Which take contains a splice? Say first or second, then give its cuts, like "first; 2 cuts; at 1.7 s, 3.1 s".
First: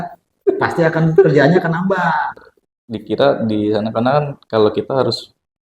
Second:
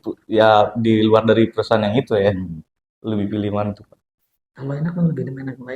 first; 1 cut; at 2.4 s